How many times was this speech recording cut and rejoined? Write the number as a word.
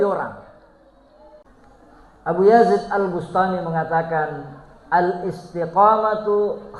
one